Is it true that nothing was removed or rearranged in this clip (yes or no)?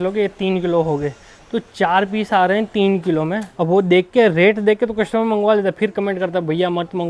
no